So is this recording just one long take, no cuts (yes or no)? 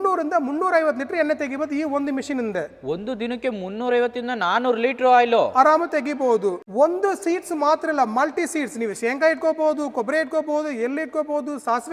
yes